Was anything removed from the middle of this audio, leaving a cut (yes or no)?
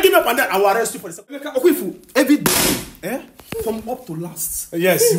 yes